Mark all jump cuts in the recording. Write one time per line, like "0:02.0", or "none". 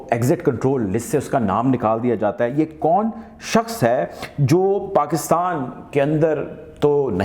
none